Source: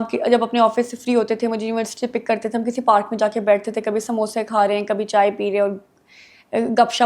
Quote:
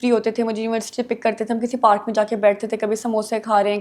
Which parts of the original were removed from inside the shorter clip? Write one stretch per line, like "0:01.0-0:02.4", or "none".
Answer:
none